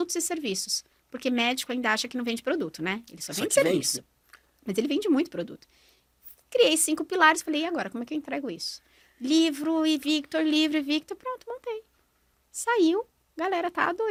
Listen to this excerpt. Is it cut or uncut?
uncut